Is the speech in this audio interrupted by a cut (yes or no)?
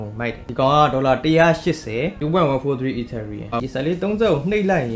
yes